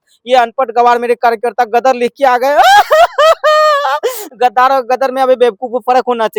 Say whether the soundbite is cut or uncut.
uncut